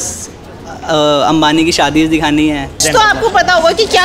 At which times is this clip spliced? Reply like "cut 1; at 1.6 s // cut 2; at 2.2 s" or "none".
cut 1; at 2.8 s

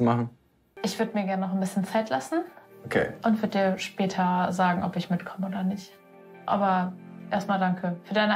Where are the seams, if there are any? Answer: none

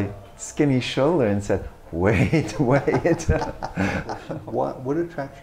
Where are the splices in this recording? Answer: cut 1; at 4.2 s

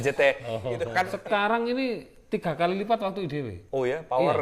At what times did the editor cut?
cut 1; at 1.1 s

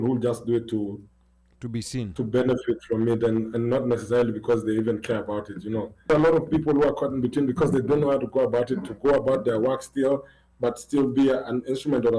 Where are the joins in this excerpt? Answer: cut 1; at 6.1 s

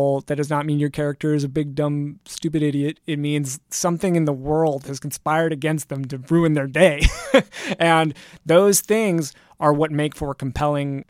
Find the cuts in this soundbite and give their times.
none

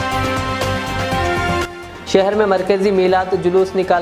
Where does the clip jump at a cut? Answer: cut 1; at 1.6 s

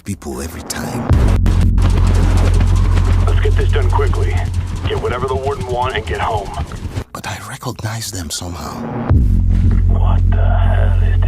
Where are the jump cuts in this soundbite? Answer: cut 1; at 6.7 s

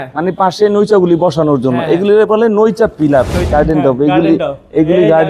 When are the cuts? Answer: cut 1; at 3.4 s

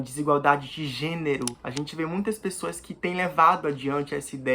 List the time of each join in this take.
cut 1; at 1.6 s

